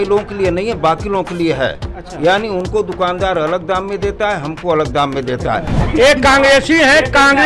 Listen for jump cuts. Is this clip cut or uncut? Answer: cut